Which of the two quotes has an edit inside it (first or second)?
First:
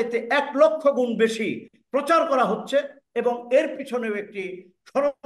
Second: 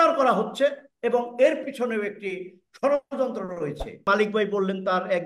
second